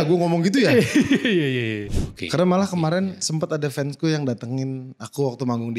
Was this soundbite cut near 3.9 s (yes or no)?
no